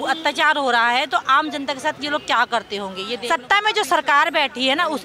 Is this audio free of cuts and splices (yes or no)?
no